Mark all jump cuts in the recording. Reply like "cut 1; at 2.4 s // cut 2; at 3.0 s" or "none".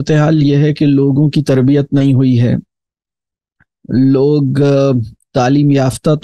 none